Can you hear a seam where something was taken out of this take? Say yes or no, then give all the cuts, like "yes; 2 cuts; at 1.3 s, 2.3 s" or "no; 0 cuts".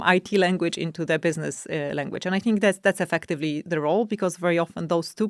no; 0 cuts